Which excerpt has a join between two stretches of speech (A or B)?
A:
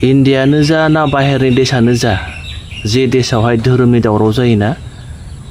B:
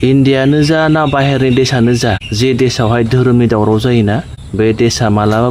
B